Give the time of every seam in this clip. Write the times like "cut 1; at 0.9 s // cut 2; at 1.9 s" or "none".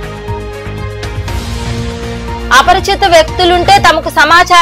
cut 1; at 1.1 s

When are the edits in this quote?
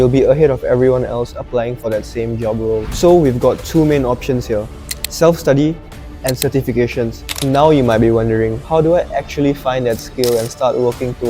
cut 1; at 2.9 s // cut 2; at 7.4 s

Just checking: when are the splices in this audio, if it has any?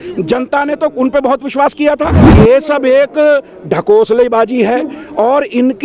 cut 1; at 2.2 s

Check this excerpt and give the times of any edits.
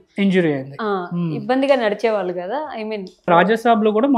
cut 1; at 3.3 s

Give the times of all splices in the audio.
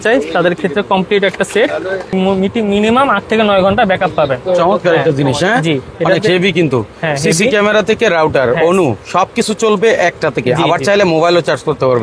cut 1; at 2.1 s

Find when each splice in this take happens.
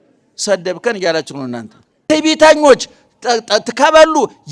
cut 1; at 1.9 s

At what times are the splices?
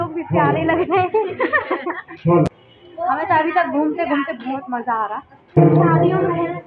cut 1; at 2.5 s // cut 2; at 5.6 s

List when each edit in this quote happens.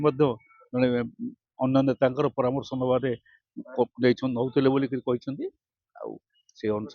none

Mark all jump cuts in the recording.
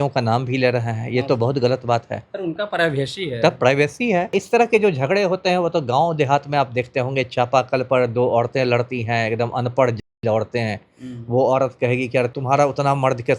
cut 1; at 4.3 s // cut 2; at 12.4 s

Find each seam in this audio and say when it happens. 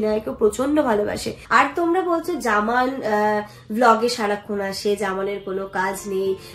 cut 1; at 1.3 s

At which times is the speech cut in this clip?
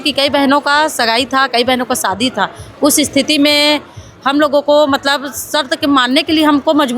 none

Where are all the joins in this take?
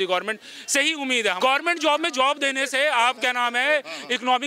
cut 1; at 1.4 s

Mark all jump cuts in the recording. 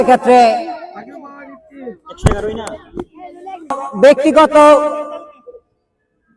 cut 1; at 3.8 s

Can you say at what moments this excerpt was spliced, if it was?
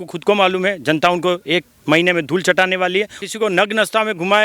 cut 1; at 3.2 s

